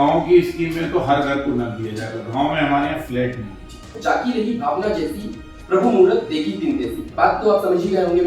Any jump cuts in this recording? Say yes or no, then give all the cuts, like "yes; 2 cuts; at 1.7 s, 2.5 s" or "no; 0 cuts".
yes; 1 cut; at 4.0 s